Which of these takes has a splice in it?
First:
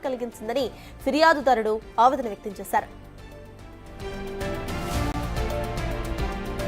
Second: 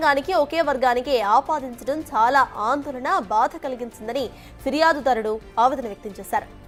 first; 1 cut; at 5.1 s

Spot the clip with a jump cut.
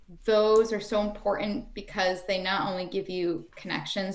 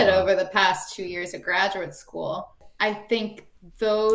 second; 1 cut; at 2.6 s

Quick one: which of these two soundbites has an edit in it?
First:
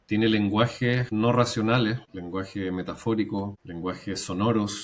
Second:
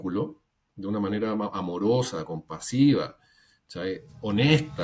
first; 3 cuts; at 1.1 s, 2.1 s, 3.6 s

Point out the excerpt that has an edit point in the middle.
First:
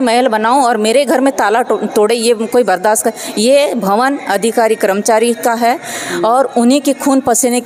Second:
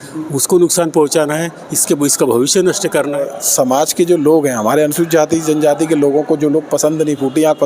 second; 1 cut; at 3.2 s

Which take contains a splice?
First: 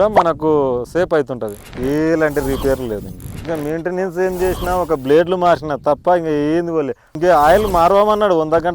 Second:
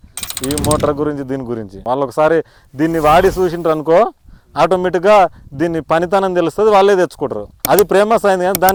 first; 3 cuts; at 1.6 s, 3.4 s, 7.0 s

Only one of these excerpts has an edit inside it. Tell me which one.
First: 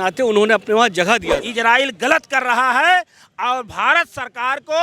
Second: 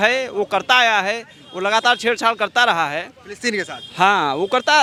first; 1 cut; at 1.4 s

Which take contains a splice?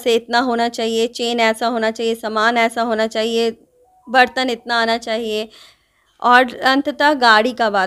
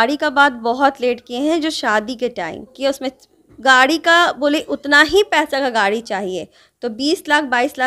second; 1 cut; at 2.7 s

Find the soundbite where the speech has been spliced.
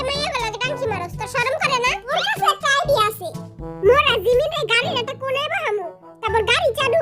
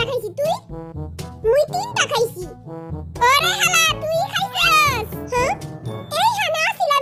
first; 1 cut; at 2.1 s

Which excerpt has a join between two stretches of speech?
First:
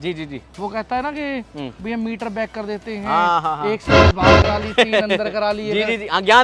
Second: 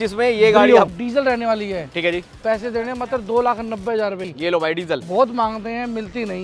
second; 2 cuts; at 1.0 s, 4.3 s

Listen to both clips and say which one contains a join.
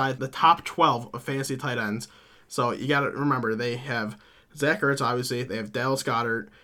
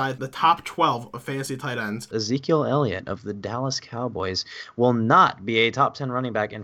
second; 1 cut; at 2.0 s

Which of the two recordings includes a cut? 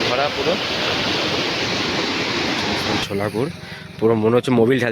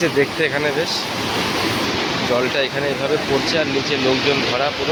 first; 1 cut; at 3.0 s

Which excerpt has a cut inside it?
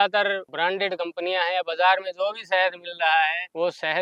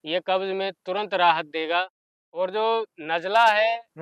second; 1 cut; at 2.0 s

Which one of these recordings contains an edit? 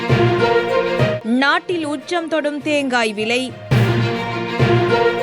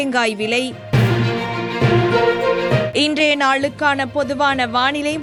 first; 1 cut; at 1.2 s

